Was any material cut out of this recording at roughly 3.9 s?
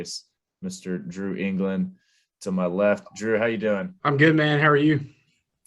yes; 1 cut; at 3.9 s

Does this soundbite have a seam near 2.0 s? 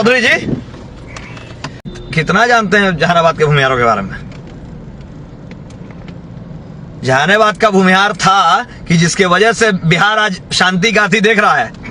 yes; 1 cut; at 2.0 s

